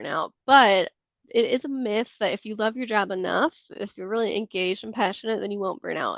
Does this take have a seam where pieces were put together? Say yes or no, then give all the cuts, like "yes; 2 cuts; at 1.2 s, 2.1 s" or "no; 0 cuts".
no; 0 cuts